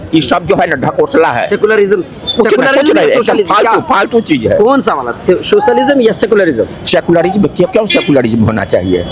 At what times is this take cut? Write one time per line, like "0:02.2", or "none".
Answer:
none